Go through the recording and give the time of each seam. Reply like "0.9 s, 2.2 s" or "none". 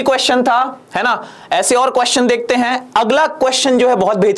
none

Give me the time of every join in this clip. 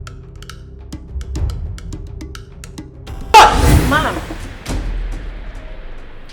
3.3 s

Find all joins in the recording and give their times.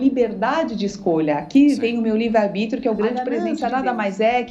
3.4 s

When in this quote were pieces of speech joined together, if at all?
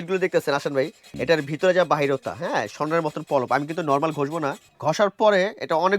1.1 s, 4.7 s

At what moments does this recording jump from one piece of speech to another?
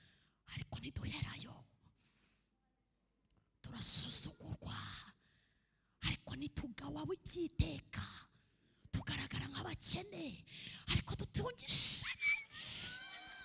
none

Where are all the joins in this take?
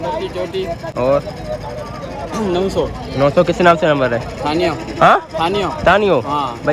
none

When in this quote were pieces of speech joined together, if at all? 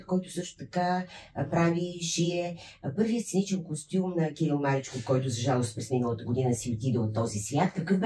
none

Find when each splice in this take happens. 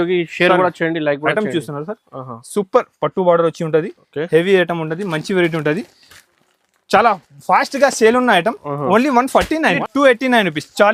9.8 s

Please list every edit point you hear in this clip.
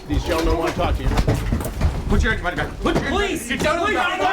1.7 s

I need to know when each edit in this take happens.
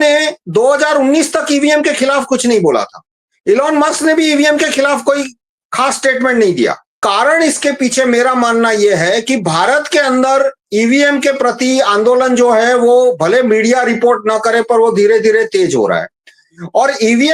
6.9 s

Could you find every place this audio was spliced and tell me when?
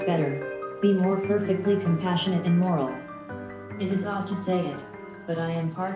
none

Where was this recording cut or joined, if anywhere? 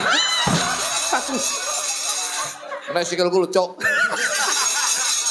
none

